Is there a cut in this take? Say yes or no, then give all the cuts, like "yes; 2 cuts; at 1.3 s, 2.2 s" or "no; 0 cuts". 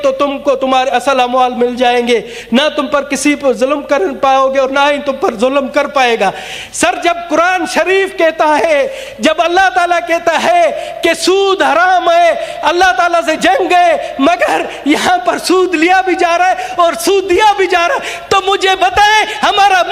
no; 0 cuts